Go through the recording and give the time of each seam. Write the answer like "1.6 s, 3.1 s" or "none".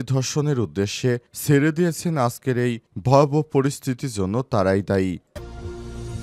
5.3 s